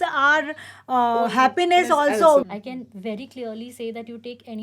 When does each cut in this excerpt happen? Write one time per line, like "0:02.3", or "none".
0:02.4